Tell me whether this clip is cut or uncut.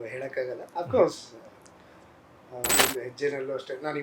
cut